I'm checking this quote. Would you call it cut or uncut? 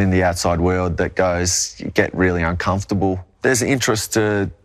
cut